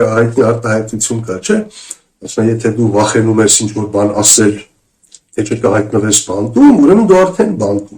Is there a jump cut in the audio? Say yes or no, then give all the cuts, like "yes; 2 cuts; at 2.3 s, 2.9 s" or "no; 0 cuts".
no; 0 cuts